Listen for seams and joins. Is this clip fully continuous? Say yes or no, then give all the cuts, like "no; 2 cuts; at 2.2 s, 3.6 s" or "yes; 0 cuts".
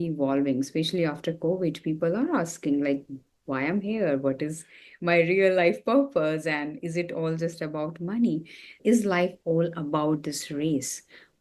no; 1 cut; at 8.8 s